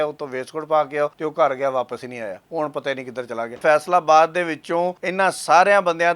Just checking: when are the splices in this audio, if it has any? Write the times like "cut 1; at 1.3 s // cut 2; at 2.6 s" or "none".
cut 1; at 1.2 s // cut 2; at 2.4 s // cut 3; at 3.6 s // cut 4; at 5.0 s